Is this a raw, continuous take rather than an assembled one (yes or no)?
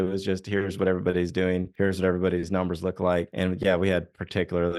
no